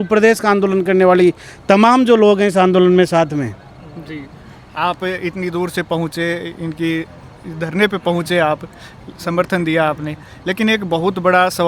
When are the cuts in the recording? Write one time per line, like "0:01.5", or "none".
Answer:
none